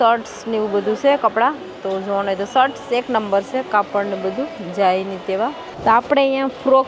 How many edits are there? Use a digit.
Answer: 1